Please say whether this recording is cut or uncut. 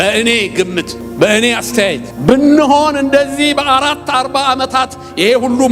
cut